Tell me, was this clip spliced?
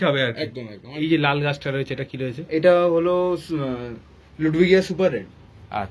yes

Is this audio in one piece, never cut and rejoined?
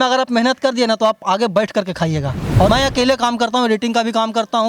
no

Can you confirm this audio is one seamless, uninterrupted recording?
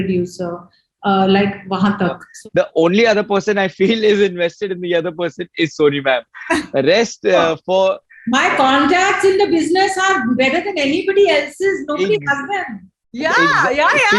no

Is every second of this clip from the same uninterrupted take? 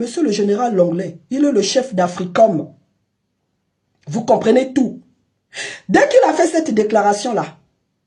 yes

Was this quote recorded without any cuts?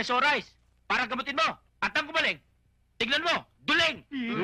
no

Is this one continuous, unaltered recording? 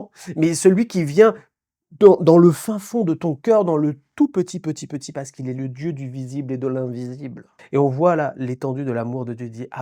no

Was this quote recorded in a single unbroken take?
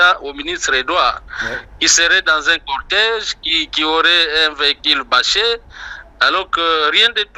yes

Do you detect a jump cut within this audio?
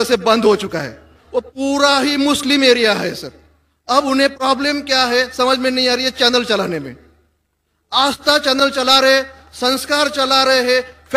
yes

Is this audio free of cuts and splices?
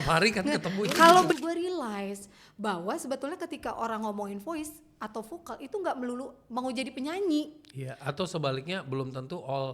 no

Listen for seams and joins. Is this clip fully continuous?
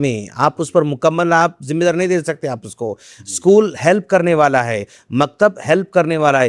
yes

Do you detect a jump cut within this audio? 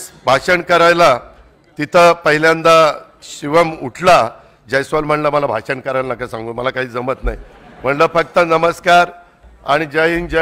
no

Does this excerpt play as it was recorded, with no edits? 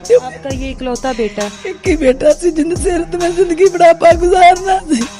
yes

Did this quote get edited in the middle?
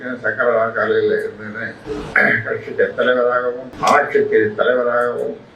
yes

